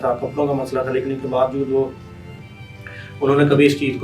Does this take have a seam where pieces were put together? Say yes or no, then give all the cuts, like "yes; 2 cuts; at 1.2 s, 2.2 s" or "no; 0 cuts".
no; 0 cuts